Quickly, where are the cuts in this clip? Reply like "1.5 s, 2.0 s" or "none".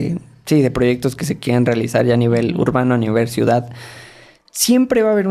none